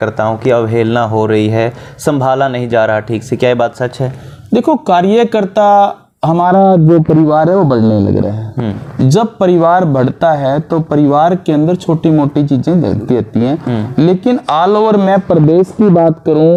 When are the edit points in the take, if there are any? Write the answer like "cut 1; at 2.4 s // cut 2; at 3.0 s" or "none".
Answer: none